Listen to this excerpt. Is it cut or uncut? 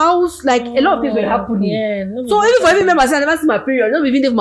uncut